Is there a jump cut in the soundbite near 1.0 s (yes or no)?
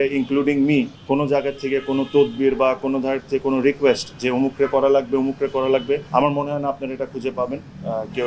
yes